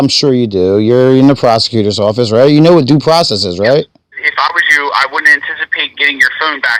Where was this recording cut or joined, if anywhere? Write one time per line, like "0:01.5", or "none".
0:04.2